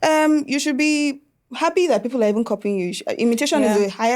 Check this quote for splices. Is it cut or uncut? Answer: uncut